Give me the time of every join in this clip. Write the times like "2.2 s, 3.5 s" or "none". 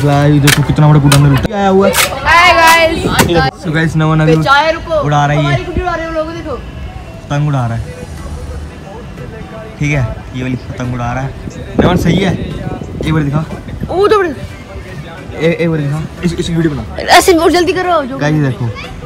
1.4 s, 3.6 s, 7.2 s, 13.7 s